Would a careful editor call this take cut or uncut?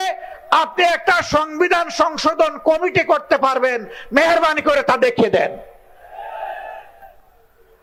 uncut